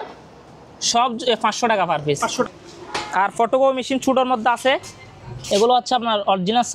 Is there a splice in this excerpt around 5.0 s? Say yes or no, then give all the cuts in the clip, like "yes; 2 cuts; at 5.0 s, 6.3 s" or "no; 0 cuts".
no; 1 cut; at 2.4 s